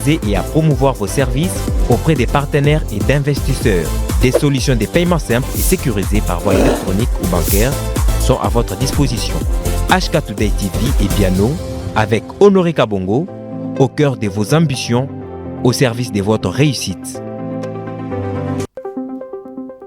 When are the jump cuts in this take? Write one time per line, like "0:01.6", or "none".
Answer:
0:18.7